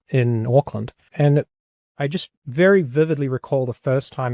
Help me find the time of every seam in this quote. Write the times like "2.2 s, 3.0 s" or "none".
1.1 s